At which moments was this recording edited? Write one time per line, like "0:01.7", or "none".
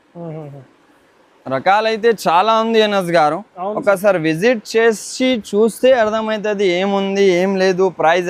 none